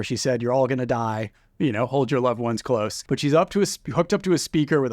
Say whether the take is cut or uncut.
cut